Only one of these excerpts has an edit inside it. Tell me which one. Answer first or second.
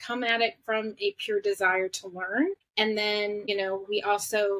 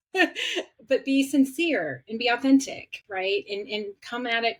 first